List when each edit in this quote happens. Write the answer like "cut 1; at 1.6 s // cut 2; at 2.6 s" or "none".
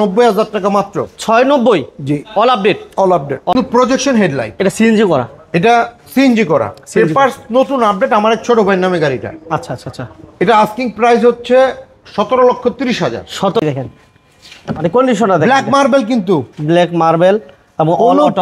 cut 1; at 3.5 s // cut 2; at 13.6 s